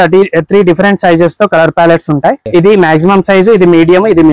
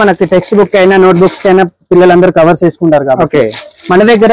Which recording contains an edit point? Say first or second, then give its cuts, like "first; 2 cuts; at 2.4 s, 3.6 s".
first; 1 cut; at 2.4 s